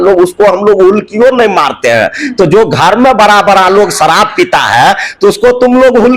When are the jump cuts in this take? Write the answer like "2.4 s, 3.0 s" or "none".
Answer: none